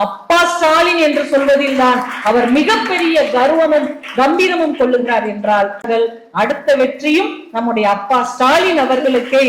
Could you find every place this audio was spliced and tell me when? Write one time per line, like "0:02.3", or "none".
0:05.8